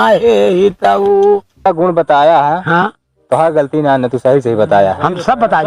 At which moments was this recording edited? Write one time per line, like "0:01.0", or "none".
0:01.7